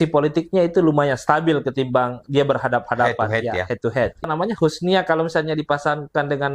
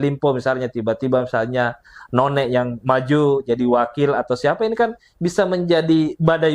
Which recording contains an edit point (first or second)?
first